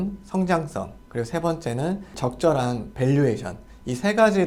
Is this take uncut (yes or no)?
yes